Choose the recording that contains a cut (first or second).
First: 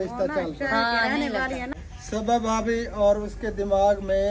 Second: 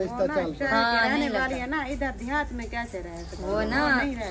first